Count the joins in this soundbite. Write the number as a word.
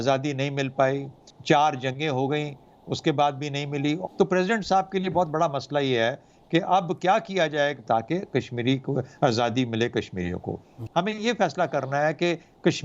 three